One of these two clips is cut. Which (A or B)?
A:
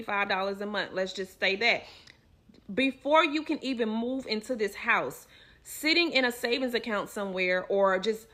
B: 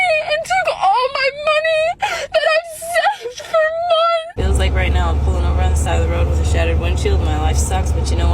B